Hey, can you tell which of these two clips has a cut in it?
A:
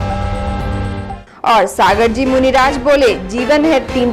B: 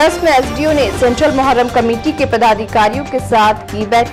A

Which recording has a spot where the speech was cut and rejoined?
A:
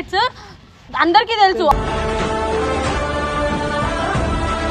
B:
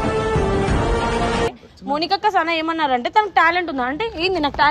B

